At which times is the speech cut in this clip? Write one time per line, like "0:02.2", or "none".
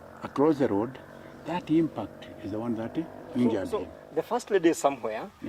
0:04.0